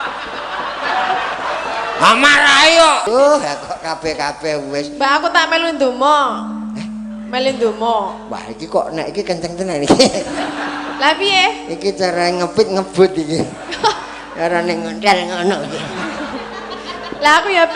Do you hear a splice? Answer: yes; 1 cut; at 3.0 s

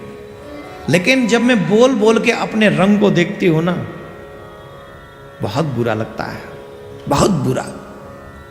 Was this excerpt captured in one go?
yes; 0 cuts

